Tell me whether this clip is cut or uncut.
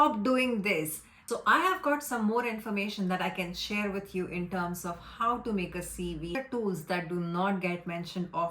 cut